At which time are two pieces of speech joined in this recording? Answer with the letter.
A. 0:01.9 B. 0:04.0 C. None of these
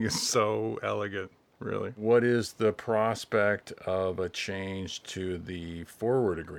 A